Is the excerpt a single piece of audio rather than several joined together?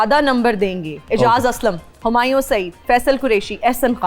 no; 2 cuts; at 0.9 s, 1.9 s

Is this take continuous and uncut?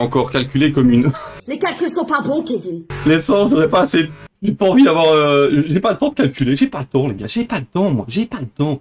no; 1 cut; at 4.2 s

